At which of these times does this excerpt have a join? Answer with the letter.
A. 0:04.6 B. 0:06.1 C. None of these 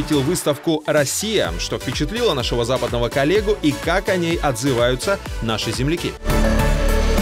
B